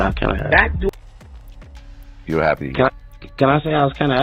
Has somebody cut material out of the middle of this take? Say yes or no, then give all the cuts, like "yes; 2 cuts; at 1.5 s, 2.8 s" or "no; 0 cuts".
no; 0 cuts